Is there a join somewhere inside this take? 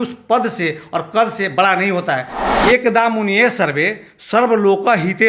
yes; 1 cut; at 2.4 s

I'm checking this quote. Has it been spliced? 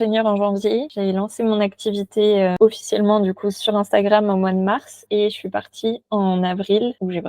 yes; 2 cuts; at 2.5 s, 3.6 s

